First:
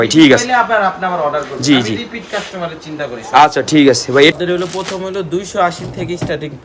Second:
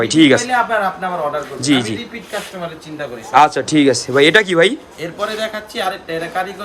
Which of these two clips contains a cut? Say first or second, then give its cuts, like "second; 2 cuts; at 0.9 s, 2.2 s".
first; 1 cut; at 4.3 s